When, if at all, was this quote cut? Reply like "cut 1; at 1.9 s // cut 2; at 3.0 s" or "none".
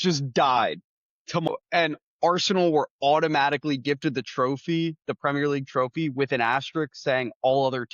cut 1; at 1.5 s

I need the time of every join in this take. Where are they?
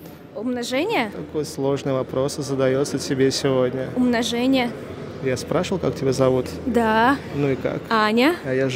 none

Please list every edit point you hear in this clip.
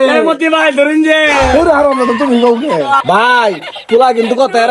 cut 1; at 3.0 s

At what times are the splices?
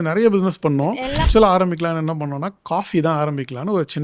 cut 1; at 1.2 s

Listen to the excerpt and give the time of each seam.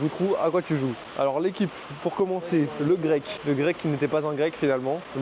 none

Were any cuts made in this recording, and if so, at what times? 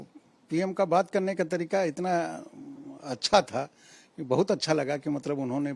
none

